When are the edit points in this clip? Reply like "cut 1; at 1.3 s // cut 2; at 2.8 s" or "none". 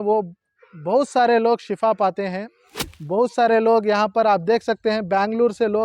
cut 1; at 2.8 s